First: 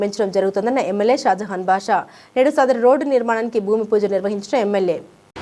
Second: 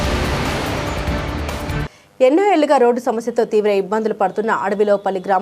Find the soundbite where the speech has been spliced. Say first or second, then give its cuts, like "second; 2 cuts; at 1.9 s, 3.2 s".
second; 1 cut; at 1.8 s